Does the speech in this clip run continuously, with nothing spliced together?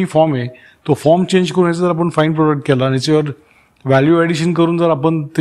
yes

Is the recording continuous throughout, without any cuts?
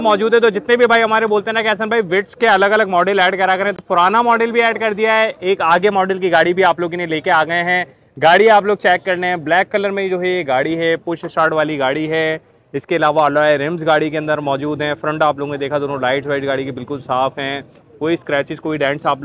yes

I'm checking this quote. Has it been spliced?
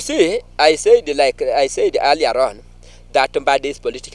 no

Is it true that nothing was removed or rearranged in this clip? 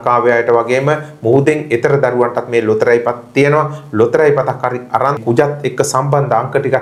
no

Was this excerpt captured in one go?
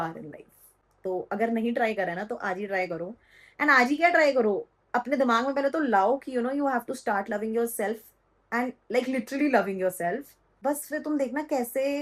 yes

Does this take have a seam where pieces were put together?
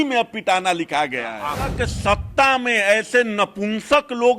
yes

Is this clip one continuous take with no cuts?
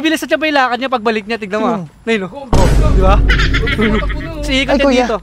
yes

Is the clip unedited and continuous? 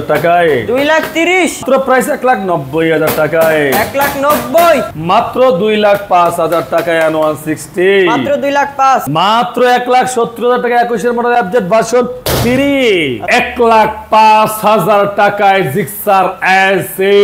no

